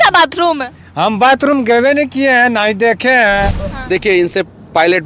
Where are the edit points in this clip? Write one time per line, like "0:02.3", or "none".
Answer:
0:03.7